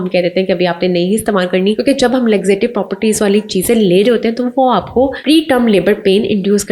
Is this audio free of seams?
no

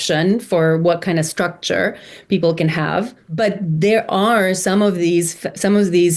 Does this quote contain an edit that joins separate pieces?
yes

